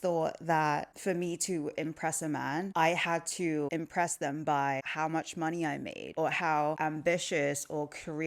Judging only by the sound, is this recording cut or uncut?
cut